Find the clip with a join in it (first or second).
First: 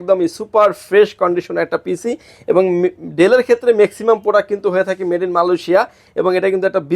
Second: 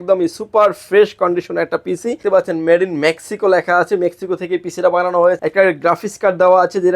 second